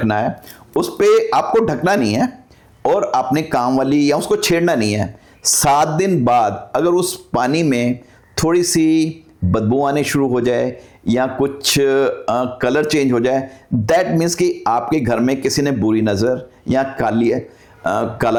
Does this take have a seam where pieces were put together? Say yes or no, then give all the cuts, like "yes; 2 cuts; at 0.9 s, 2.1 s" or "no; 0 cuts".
no; 0 cuts